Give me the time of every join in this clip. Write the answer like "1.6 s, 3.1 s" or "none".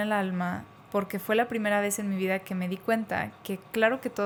none